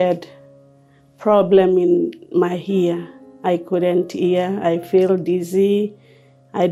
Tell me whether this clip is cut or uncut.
uncut